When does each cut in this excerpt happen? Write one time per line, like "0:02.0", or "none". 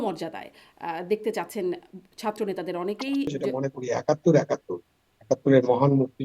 0:03.4